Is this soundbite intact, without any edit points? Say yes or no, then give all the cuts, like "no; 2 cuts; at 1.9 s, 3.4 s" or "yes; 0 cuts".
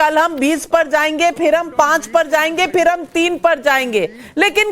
no; 1 cut; at 1.1 s